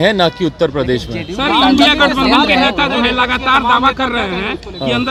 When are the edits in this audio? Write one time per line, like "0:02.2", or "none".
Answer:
none